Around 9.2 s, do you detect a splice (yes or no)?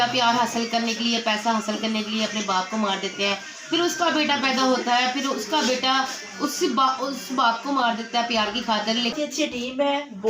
yes